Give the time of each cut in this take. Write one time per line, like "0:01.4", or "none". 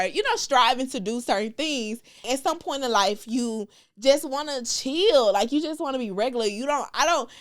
0:02.3